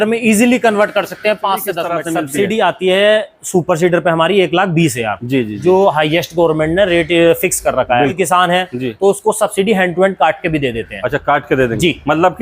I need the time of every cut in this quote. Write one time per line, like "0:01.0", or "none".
0:02.0
0:08.2